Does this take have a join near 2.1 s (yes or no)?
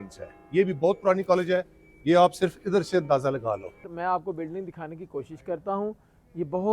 no